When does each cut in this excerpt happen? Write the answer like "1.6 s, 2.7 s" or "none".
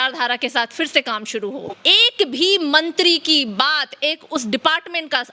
1.7 s